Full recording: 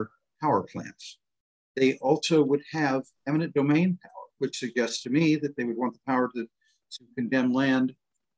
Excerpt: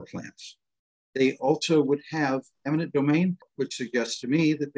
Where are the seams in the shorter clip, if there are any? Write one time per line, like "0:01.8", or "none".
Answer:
0:03.4

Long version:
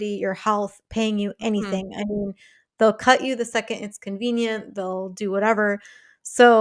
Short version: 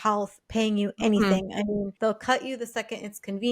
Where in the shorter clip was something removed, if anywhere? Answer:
0:01.9

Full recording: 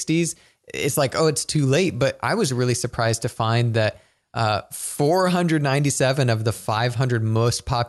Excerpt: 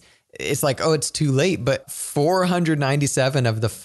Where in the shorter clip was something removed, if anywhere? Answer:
0:01.9

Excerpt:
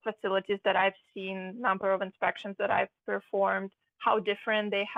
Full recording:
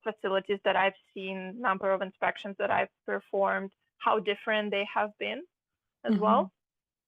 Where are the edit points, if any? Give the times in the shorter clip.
none

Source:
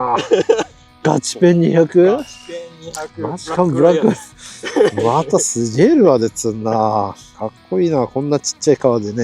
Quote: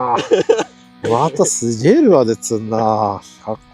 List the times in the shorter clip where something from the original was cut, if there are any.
0:01.0

